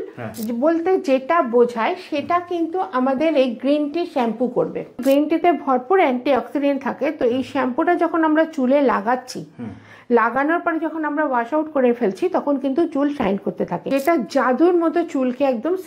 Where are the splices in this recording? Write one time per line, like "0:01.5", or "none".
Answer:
0:05.0
0:13.8

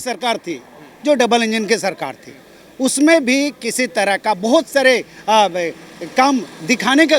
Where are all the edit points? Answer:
none

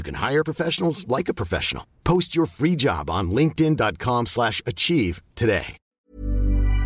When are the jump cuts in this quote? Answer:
0:05.9

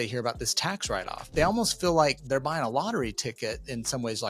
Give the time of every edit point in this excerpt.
0:01.2
0:02.2

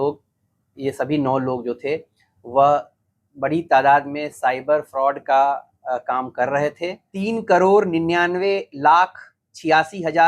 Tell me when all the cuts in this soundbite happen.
0:07.1

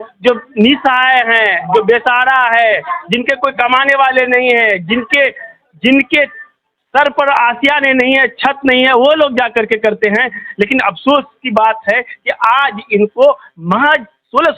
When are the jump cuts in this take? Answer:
none

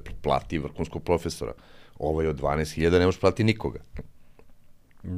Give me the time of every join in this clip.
none

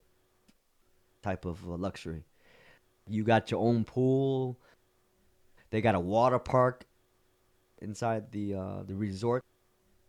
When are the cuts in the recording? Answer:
none

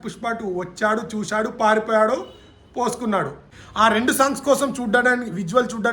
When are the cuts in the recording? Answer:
0:03.4

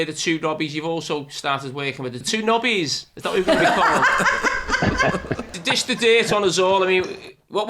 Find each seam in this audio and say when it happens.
0:02.2
0:05.6

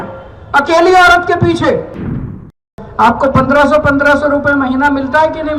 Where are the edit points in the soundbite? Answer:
0:02.5

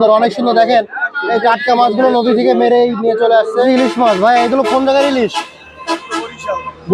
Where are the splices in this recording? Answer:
0:03.7

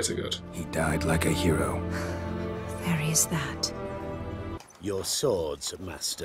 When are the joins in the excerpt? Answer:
0:04.6

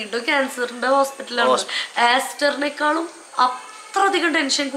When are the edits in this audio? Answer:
0:01.8

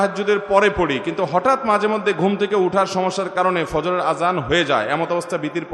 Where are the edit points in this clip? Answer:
none

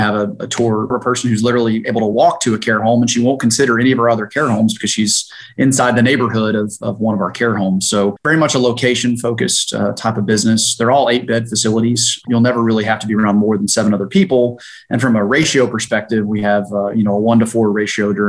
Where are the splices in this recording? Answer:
0:00.9
0:08.2
0:12.2

